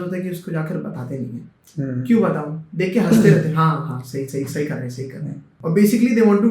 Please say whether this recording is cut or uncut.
cut